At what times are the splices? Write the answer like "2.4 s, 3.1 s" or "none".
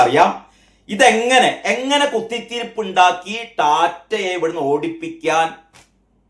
none